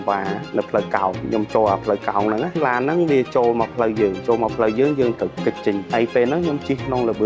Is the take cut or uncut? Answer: cut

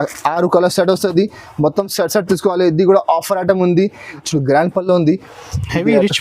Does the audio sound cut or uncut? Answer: cut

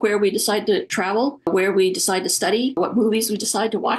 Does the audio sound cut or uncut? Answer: cut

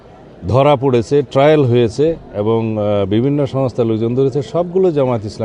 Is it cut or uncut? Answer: uncut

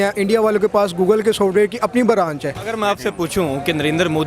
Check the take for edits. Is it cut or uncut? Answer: cut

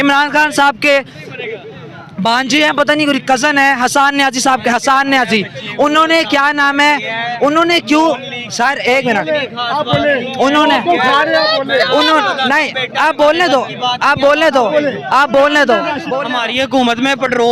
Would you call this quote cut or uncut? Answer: cut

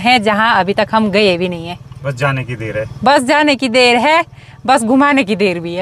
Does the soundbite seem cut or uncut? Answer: uncut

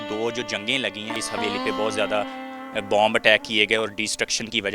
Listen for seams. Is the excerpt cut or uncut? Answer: cut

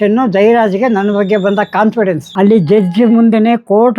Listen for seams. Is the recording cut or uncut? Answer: cut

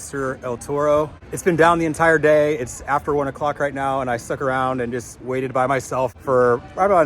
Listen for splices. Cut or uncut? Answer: uncut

